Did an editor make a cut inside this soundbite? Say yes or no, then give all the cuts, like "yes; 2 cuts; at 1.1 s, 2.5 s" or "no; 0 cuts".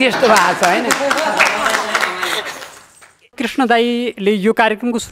yes; 2 cuts; at 3.3 s, 4.1 s